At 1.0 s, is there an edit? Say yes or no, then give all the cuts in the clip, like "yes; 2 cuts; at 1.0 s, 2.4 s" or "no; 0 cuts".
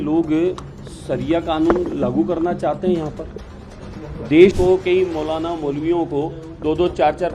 no; 1 cut; at 4.5 s